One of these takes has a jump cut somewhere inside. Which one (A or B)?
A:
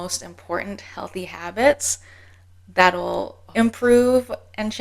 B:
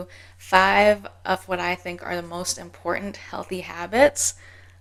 A